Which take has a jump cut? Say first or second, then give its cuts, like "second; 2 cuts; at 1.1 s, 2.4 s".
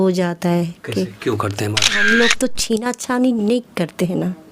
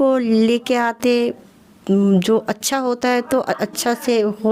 first; 1 cut; at 2.0 s